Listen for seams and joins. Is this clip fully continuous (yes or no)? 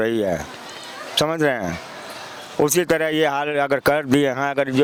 yes